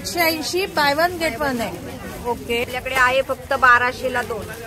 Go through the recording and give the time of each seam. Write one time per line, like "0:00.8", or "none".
0:02.6